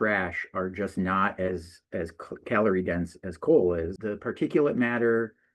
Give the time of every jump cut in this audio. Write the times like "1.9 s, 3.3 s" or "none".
4.0 s